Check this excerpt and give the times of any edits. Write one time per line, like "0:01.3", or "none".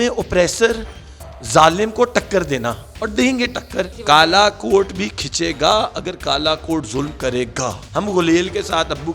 0:03.9
0:07.8